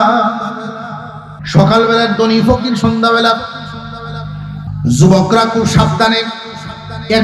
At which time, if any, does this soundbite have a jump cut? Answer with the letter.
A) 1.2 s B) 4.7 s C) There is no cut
B